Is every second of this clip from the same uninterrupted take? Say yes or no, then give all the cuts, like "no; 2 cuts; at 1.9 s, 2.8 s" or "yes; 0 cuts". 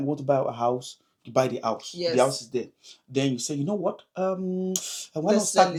yes; 0 cuts